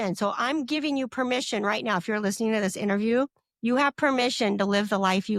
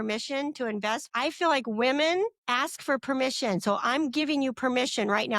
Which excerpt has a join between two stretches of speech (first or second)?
second